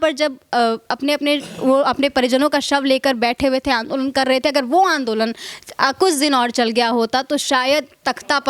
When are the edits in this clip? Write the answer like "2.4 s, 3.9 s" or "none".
none